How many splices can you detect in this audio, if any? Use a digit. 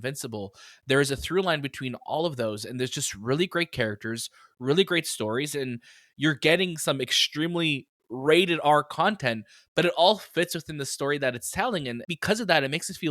1